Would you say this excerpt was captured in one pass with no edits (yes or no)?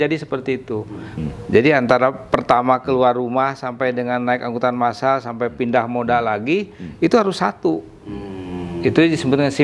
no